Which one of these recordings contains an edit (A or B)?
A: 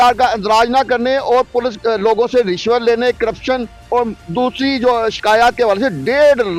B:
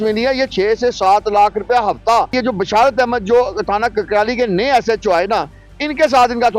B